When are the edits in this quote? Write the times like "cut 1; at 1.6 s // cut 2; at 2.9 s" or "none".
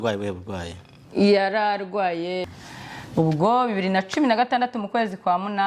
cut 1; at 2.6 s